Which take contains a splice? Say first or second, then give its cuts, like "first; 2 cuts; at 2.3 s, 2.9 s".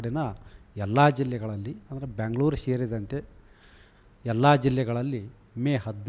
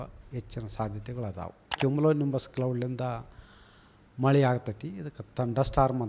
second; 1 cut; at 1.7 s